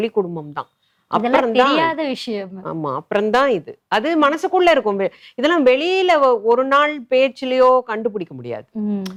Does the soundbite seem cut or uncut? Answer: uncut